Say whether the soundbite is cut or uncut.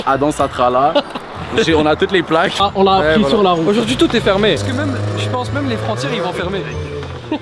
cut